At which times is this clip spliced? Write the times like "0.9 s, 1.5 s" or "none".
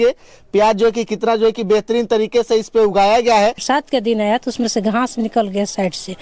3.6 s

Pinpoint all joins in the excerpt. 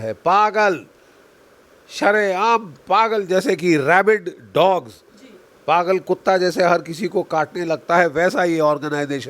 none

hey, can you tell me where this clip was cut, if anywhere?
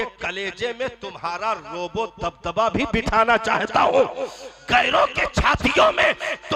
none

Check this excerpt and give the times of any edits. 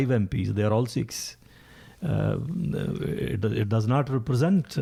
none

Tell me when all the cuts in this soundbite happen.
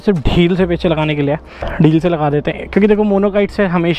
1.6 s

